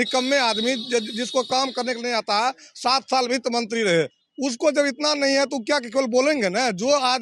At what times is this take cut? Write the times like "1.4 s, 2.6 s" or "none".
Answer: none